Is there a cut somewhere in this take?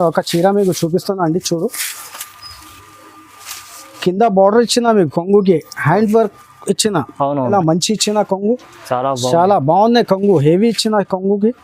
yes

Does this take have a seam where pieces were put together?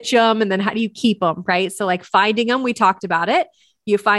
no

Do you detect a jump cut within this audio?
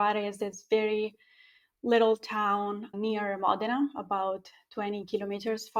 no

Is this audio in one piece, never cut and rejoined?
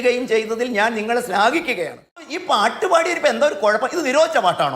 no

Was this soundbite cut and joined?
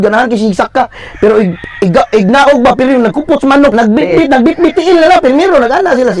yes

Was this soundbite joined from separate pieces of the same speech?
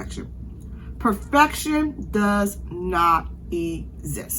no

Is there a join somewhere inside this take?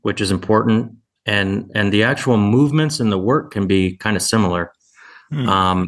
no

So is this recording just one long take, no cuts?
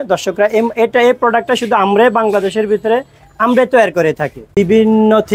yes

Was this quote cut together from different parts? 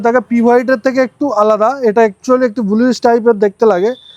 no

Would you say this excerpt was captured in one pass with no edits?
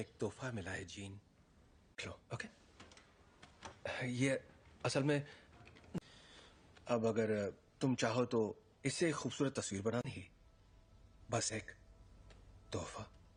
yes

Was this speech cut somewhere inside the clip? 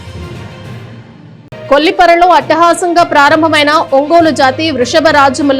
no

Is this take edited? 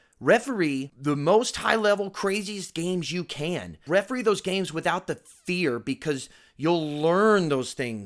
yes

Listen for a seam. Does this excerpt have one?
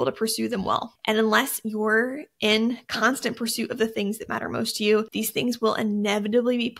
yes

